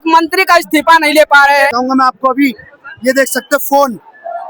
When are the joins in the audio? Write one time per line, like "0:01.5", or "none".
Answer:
0:01.7